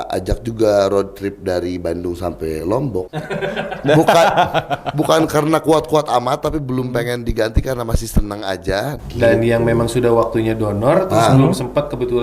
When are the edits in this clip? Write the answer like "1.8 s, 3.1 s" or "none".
3.1 s, 9.0 s